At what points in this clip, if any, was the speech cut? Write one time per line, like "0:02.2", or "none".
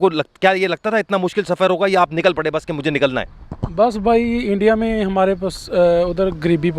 none